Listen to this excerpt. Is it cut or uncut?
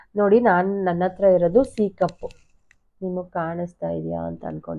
uncut